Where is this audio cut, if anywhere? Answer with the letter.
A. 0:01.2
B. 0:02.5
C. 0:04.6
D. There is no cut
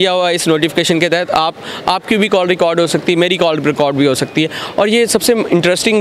D